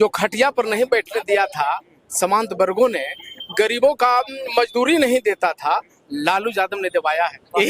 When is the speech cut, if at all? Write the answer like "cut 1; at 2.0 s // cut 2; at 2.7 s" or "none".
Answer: none